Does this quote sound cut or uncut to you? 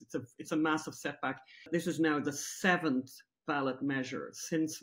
cut